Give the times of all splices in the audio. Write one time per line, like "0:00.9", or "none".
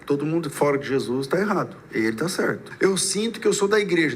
0:02.7